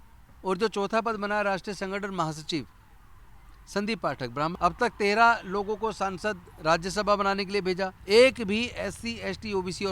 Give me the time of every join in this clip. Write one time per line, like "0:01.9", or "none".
0:04.5
0:08.0